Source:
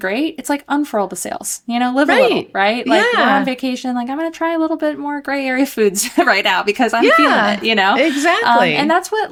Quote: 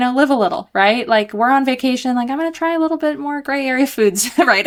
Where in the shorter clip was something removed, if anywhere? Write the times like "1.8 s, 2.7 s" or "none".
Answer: none

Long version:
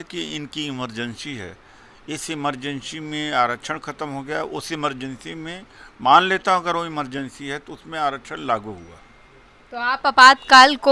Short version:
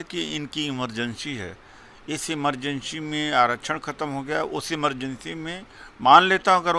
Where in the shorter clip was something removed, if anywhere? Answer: none

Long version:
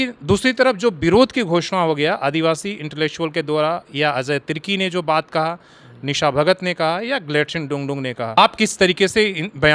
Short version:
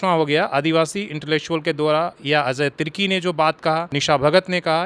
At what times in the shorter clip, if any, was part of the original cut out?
3.9 s

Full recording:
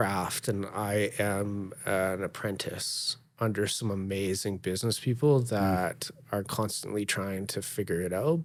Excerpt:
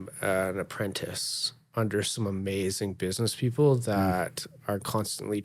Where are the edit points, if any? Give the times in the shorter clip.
none

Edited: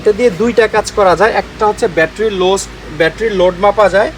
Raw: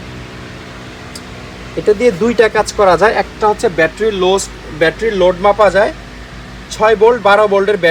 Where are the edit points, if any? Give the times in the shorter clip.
none

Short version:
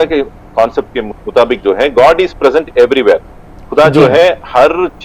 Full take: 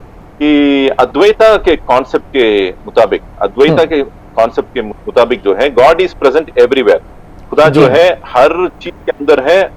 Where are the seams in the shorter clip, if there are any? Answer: none

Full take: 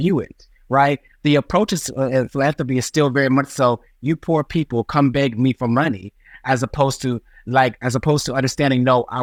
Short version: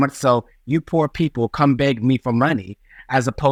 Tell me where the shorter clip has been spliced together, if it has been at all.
none

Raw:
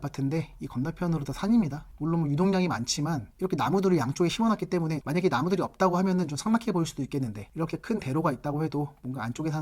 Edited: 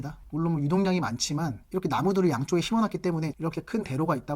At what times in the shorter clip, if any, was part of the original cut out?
3.3 s

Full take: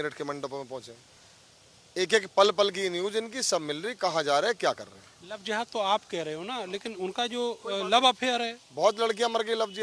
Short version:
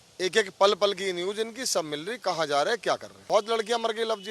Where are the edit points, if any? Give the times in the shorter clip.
3.1 s

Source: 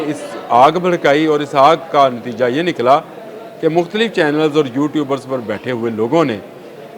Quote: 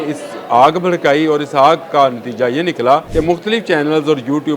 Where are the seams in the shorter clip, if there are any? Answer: 3.1 s

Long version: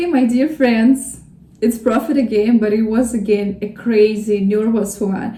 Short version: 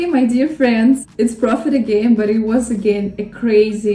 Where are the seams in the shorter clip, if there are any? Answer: 1.1 s

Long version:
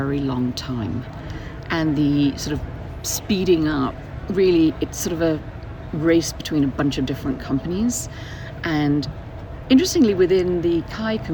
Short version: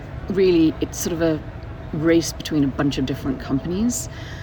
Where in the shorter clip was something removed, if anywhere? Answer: none

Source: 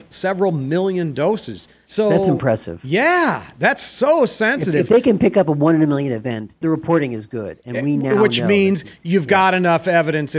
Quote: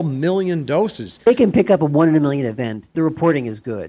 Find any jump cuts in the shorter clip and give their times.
1.3 s

